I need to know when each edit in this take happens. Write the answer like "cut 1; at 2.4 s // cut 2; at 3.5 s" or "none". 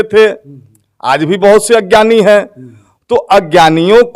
none